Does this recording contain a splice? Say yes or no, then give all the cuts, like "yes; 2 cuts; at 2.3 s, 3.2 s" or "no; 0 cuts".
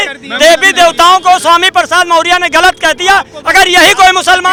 no; 0 cuts